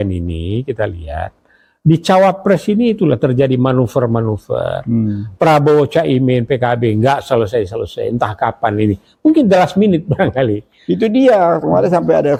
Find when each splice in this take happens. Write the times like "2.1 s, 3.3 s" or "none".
none